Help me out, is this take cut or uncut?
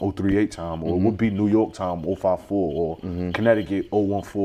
uncut